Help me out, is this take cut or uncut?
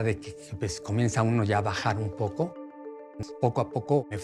cut